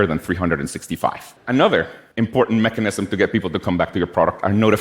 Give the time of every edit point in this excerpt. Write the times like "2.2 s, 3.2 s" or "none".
1.3 s, 2.0 s